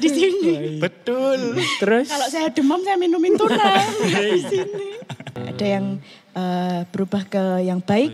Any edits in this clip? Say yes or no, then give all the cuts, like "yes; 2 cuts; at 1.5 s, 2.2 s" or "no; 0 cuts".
yes; 1 cut; at 5.3 s